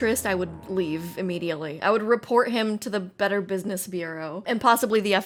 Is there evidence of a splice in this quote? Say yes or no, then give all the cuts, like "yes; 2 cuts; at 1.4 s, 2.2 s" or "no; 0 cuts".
no; 0 cuts